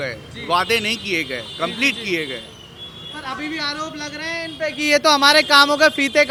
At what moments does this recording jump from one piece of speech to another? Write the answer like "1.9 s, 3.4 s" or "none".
none